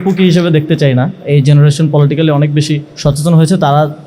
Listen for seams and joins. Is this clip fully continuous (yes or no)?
no